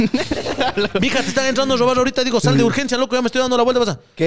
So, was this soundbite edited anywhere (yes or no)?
no